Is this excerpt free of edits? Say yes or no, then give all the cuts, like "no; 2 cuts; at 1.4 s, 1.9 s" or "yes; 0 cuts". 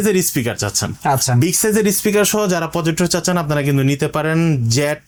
yes; 0 cuts